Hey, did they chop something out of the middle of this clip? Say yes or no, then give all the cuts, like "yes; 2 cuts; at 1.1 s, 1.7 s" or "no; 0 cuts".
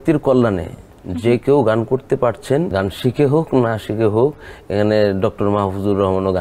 yes; 1 cut; at 2.7 s